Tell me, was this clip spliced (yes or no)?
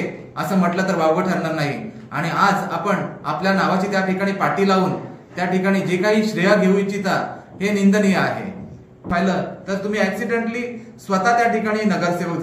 yes